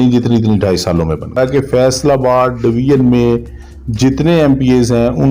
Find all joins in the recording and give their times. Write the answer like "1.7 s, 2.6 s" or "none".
1.4 s

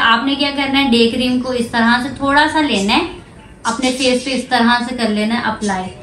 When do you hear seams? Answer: none

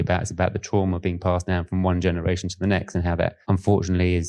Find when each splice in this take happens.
3.4 s

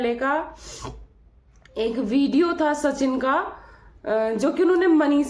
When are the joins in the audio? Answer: none

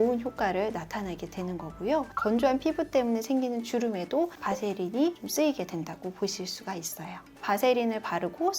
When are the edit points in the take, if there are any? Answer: 7.4 s

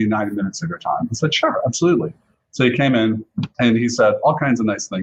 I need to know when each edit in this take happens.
none

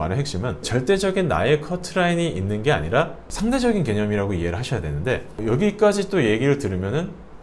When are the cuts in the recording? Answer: none

